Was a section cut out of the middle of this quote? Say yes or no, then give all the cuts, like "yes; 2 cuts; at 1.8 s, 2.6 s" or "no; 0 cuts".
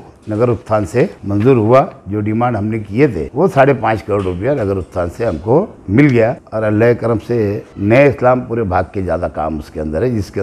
yes; 5 cuts; at 1.2 s, 3.2 s, 5.8 s, 6.4 s, 7.7 s